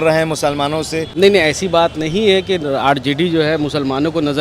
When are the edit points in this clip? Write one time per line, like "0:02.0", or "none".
0:01.0